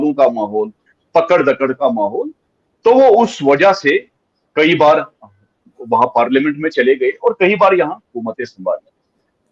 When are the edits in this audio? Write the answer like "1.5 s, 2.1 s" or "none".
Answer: none